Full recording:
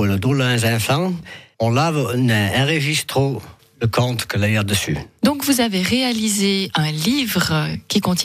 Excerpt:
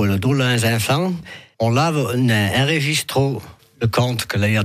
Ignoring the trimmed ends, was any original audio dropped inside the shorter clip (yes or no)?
no